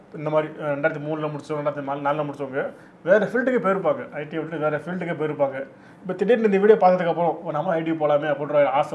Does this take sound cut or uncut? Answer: uncut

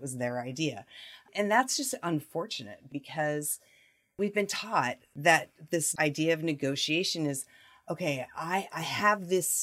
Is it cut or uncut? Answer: cut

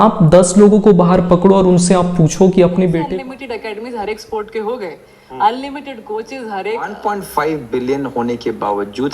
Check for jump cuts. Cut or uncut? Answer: cut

